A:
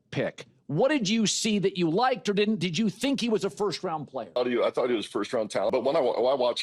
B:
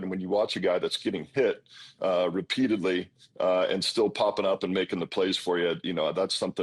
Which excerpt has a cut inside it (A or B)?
A